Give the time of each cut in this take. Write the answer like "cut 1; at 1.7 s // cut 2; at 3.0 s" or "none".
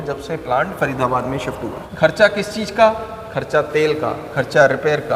cut 1; at 1.8 s